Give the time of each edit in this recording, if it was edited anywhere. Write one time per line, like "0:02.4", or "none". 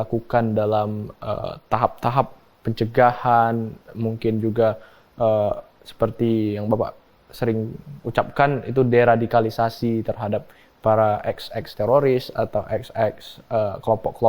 none